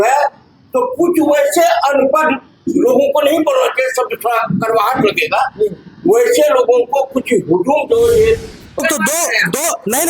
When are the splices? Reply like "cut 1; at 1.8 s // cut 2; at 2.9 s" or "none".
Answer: cut 1; at 8.8 s